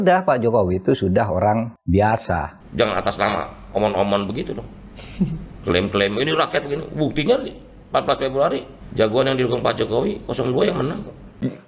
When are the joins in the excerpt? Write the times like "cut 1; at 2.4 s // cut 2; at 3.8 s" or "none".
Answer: cut 1; at 2.5 s

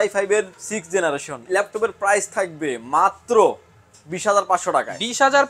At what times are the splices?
cut 1; at 1.4 s

